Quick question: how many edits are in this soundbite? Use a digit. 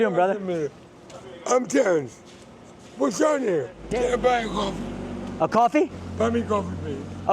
1